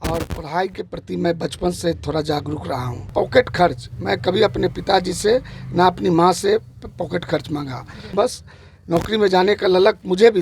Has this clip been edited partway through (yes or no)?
yes